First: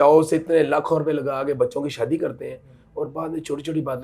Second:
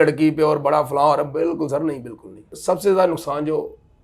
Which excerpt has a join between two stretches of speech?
second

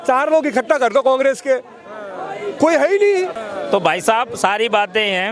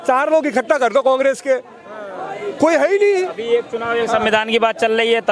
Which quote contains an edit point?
first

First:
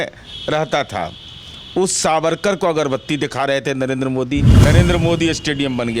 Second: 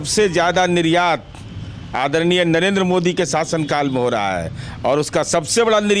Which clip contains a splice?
first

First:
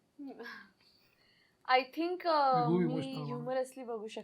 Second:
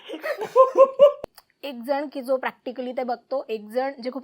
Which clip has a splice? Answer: second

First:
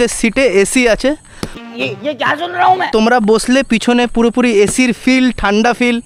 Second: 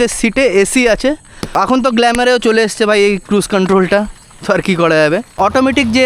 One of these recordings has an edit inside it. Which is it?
second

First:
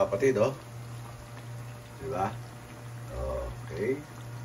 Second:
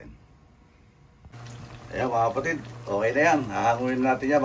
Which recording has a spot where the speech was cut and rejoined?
second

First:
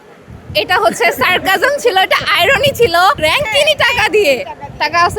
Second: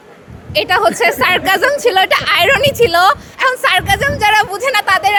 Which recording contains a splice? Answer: first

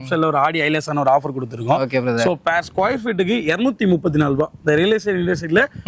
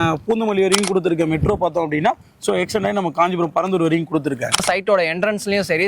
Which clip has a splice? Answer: second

